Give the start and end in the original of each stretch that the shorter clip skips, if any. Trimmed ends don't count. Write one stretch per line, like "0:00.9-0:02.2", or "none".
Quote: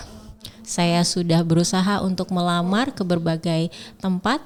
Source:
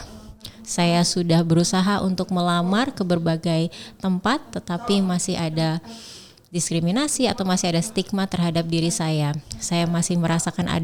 none

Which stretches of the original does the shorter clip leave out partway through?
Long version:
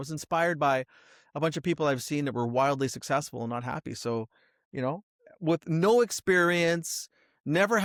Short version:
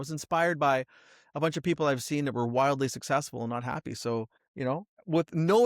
0:04.7-0:05.0

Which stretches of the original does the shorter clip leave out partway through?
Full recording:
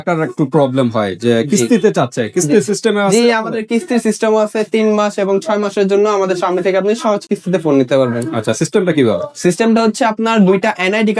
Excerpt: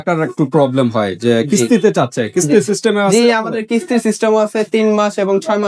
none

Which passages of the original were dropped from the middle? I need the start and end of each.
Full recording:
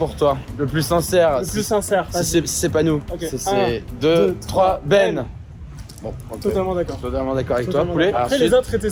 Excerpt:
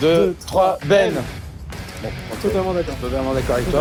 none

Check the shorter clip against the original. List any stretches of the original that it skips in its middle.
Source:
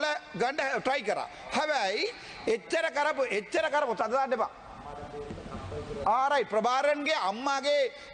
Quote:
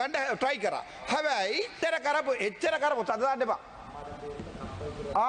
0:02.2-0:02.6

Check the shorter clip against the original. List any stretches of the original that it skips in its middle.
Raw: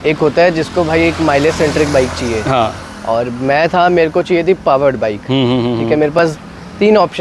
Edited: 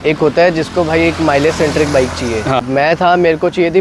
0:02.6-0:03.3

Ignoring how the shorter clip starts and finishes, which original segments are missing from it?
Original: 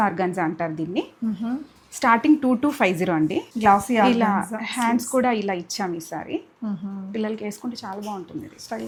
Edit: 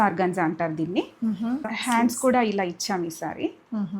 0:01.7-0:04.6

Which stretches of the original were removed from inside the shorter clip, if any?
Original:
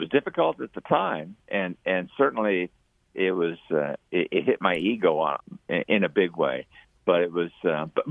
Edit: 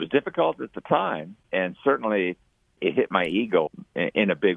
0:01.4-0:01.7
0:03.1-0:04.3
0:05.2-0:05.4

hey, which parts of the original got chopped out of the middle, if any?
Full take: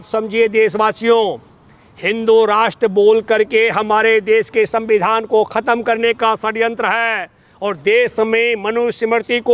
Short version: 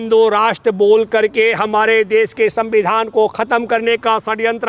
none

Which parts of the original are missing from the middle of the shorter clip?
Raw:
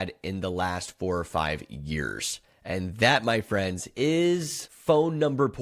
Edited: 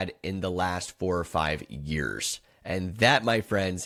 none

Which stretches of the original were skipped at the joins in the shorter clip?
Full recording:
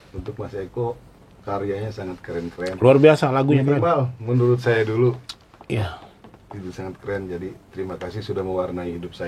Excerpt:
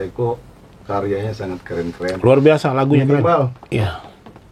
0:04.2-0:05.6

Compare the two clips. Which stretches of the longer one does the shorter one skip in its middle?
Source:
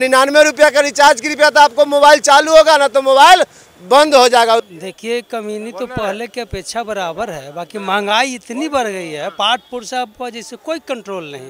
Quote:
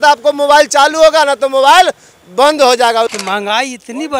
0:04.7-0:07.8

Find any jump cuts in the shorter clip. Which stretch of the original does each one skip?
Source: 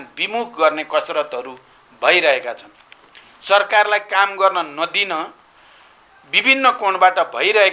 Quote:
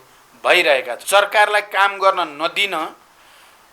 0:02.5-0:03.3

